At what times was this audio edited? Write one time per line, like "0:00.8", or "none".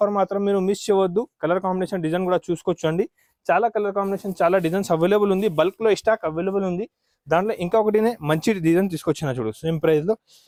none